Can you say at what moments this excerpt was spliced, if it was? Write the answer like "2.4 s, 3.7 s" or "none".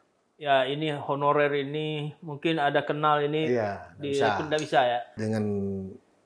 5.1 s